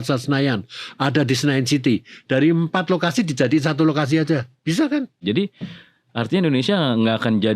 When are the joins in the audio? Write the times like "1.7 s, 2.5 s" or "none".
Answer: 5.2 s